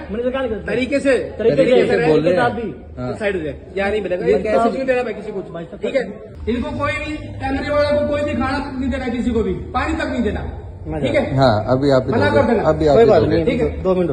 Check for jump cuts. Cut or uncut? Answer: uncut